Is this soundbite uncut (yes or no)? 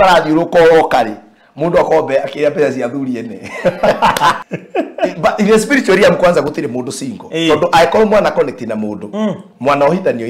no